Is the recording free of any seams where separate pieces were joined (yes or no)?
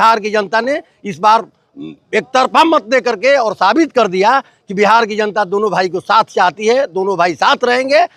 yes